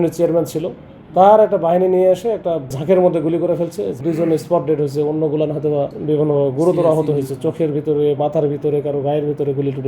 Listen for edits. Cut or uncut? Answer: cut